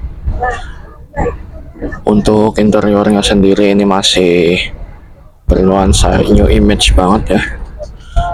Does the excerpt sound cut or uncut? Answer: uncut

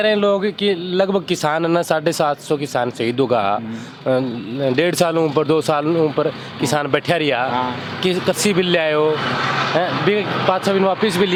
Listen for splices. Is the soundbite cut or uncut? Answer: uncut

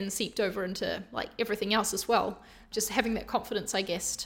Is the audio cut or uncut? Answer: cut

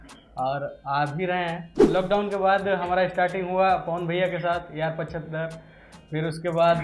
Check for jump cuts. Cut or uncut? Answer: cut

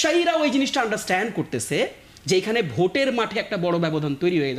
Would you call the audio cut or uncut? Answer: uncut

